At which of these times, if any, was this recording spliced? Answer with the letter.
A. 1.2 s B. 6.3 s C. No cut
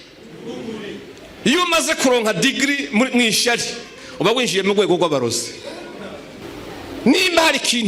A